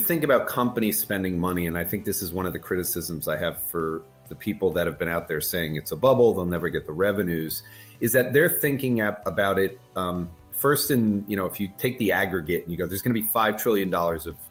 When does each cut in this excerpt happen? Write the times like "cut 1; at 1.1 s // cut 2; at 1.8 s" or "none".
none